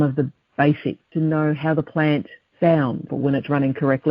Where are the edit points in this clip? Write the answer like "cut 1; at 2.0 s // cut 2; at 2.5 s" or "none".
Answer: cut 1; at 1.1 s // cut 2; at 2.4 s // cut 3; at 3.1 s